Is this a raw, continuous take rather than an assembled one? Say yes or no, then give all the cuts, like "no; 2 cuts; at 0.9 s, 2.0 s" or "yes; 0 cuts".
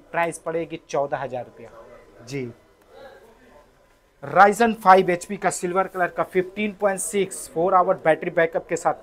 yes; 0 cuts